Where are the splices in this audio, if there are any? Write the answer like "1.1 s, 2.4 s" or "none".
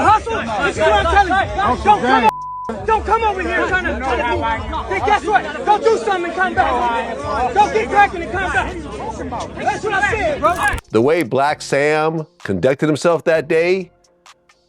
10.8 s